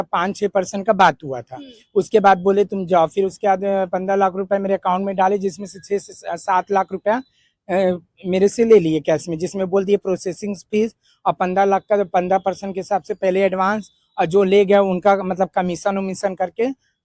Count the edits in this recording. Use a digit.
0